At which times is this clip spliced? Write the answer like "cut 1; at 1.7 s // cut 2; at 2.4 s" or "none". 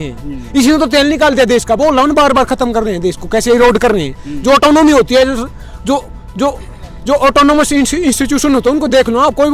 none